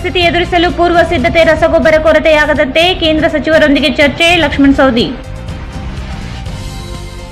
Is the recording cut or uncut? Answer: uncut